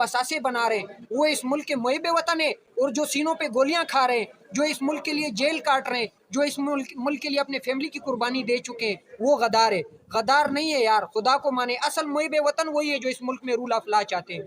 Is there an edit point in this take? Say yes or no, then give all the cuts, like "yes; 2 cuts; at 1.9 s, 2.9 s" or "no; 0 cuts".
no; 0 cuts